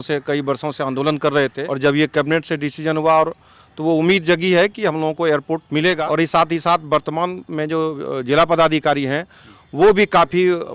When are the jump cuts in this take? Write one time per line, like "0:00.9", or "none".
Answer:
0:01.6
0:06.0